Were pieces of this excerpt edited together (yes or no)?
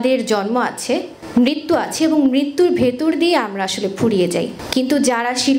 yes